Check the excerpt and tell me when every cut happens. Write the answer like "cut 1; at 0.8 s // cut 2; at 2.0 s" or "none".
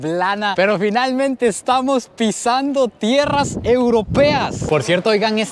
cut 1; at 4.6 s

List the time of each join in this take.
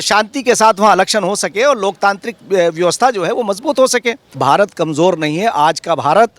cut 1; at 4.3 s

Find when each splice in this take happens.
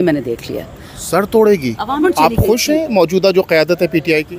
cut 1; at 2.0 s

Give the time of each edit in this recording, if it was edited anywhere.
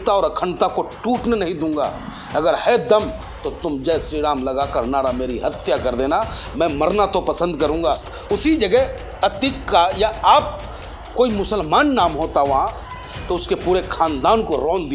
cut 1; at 8.1 s

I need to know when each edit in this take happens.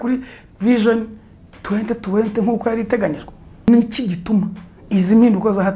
cut 1; at 3.7 s

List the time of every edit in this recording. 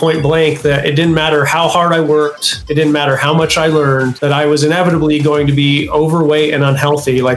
cut 1; at 2.6 s // cut 2; at 4.1 s

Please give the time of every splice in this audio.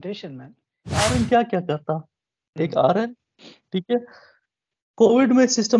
cut 1; at 1.1 s

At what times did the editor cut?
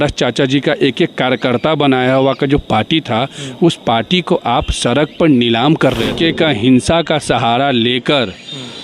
cut 1; at 6.1 s

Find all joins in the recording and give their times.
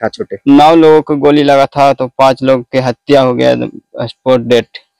none

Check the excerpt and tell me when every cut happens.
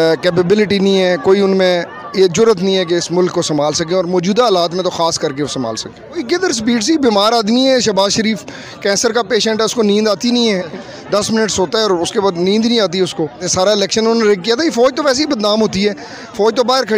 cut 1; at 6.2 s // cut 2; at 10.8 s // cut 3; at 13.4 s

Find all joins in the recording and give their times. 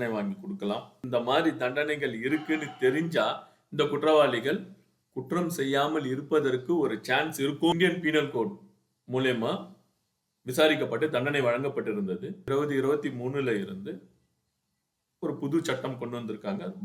cut 1; at 1.0 s // cut 2; at 7.7 s // cut 3; at 12.3 s

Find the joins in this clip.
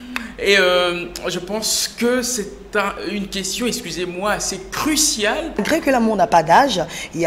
cut 1; at 5.6 s

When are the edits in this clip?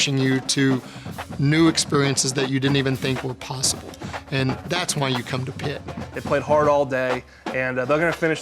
cut 1; at 6.1 s

